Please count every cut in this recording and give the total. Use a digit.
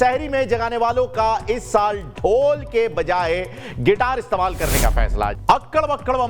1